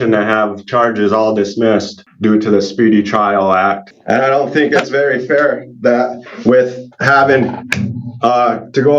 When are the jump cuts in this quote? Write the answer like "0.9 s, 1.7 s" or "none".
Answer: 2.0 s, 3.9 s

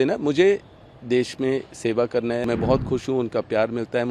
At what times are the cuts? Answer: 2.4 s

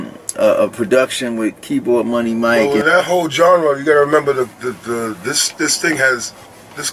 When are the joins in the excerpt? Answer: 2.7 s

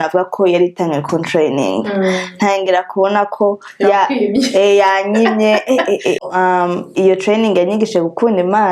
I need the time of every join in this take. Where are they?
6.2 s

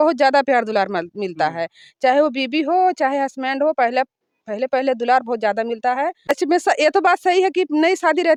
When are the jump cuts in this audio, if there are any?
none

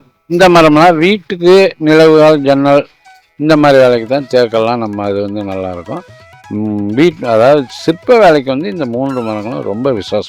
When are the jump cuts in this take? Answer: none

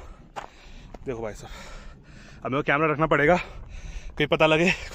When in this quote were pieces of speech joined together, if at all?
none

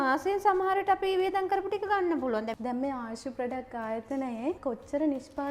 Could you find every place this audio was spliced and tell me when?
2.5 s

